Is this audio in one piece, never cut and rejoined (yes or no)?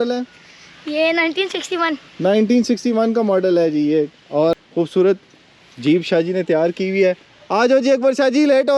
yes